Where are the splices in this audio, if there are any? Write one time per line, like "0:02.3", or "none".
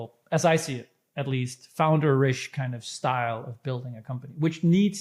none